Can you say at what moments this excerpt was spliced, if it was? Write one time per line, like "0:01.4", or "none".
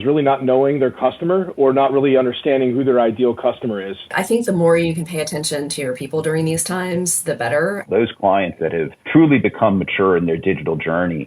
0:04.2
0:07.9